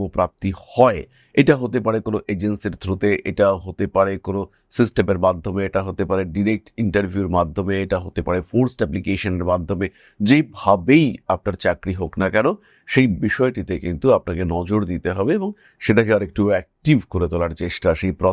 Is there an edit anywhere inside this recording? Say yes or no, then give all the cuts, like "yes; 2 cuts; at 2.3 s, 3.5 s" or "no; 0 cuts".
no; 0 cuts